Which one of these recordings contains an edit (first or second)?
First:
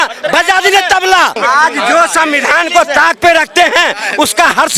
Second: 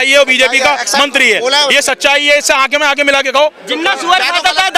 first